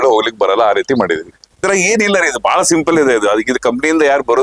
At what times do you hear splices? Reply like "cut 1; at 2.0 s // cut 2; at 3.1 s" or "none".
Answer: cut 1; at 1.6 s